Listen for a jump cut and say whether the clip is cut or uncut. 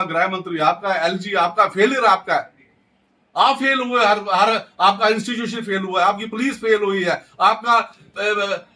uncut